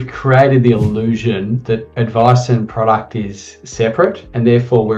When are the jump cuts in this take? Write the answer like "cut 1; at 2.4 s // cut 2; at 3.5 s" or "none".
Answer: none